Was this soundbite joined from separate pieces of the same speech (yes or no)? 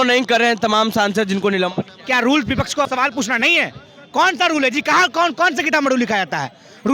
yes